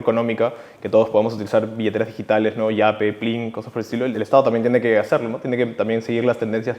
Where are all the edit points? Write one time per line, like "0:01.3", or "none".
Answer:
0:04.1